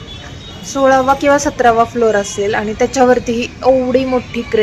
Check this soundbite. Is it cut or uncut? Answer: uncut